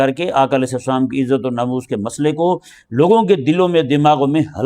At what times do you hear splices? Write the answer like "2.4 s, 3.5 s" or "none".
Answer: none